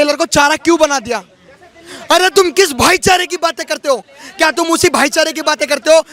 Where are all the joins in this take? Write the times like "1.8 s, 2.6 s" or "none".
none